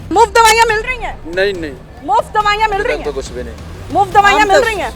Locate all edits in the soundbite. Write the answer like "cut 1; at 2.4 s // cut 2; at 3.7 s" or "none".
none